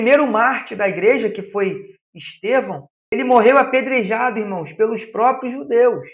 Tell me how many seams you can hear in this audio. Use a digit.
1